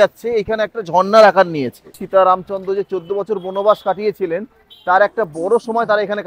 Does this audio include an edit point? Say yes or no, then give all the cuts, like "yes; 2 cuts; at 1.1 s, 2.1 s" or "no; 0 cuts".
yes; 1 cut; at 2.0 s